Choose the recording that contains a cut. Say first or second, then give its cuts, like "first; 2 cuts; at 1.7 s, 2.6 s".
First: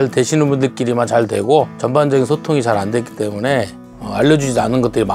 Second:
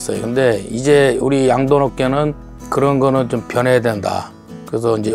first; 2 cuts; at 1.8 s, 3.8 s